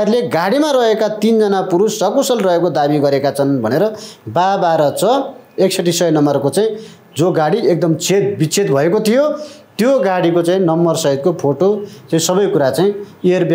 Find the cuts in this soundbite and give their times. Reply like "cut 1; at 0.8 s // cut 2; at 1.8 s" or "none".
none